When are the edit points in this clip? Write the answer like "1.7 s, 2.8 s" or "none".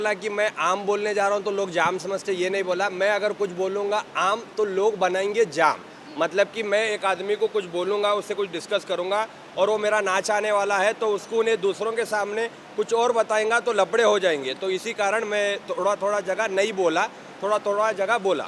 none